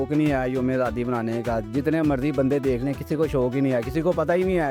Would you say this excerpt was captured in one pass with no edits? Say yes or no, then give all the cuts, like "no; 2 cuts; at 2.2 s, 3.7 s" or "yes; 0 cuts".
yes; 0 cuts